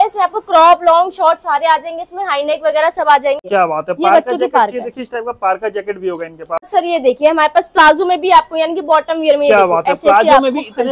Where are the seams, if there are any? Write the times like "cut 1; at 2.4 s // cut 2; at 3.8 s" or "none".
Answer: cut 1; at 3.4 s // cut 2; at 6.5 s